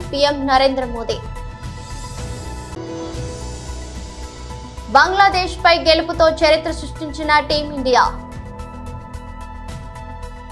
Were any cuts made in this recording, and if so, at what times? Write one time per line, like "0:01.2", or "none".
0:01.2
0:02.7
0:04.6
0:08.1